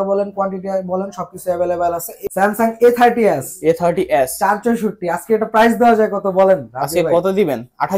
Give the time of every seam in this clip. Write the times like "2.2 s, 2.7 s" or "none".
2.1 s